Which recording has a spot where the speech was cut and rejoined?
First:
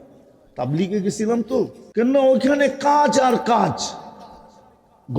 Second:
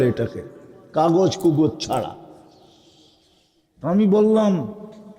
first; 1 cut; at 1.8 s

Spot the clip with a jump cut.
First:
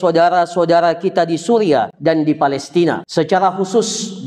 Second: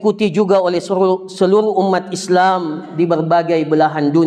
first; 2 cuts; at 1.9 s, 3.0 s

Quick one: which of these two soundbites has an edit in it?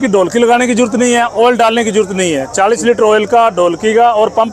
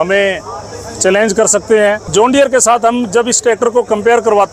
second; 1 cut; at 2.1 s

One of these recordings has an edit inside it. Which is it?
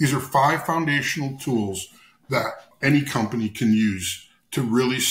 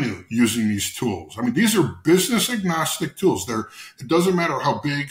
first; 1 cut; at 2.7 s

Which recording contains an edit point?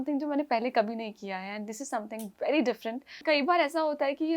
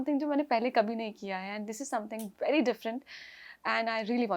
first; 1 cut; at 3.2 s

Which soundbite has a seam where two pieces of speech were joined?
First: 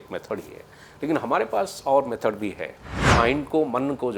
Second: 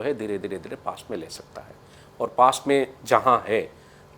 first; 1 cut; at 3.0 s

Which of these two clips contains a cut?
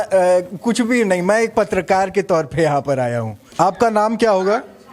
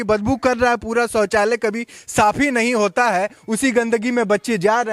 first; 1 cut; at 3.5 s

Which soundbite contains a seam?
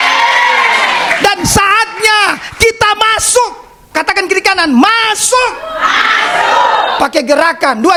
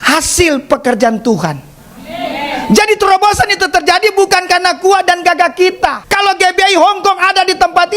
second; 1 cut; at 6.0 s

